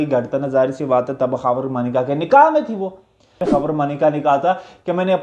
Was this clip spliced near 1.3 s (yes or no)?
no